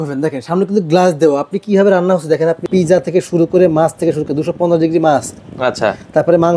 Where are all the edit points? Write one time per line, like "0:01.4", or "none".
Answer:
0:02.6